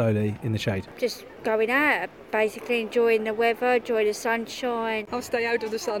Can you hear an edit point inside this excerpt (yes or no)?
yes